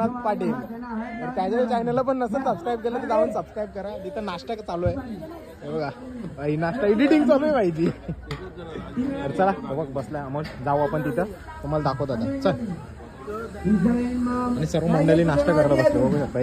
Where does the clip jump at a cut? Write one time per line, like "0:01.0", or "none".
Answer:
none

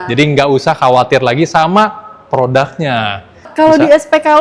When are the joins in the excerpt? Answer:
0:03.5

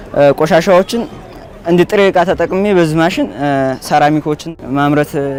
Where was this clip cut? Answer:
none

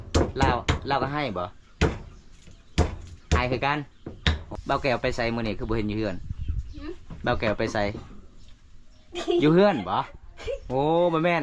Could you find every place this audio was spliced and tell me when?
0:04.4

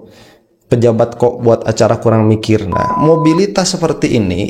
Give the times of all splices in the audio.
0:02.9

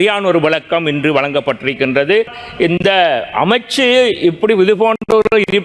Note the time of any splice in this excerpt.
0:02.4

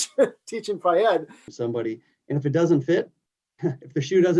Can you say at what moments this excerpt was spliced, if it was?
0:01.5

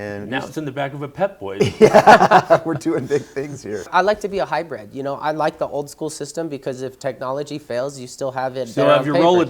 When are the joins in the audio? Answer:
0:03.9

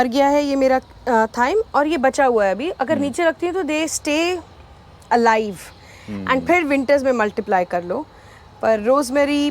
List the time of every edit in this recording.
none

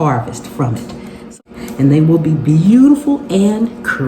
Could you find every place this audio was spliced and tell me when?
0:01.3

